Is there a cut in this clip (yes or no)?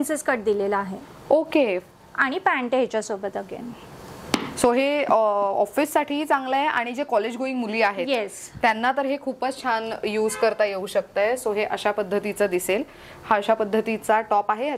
no